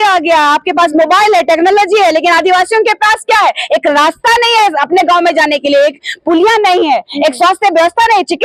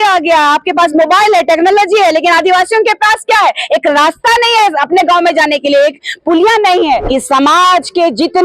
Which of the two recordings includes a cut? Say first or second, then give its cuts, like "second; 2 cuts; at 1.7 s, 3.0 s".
second; 1 cut; at 7.0 s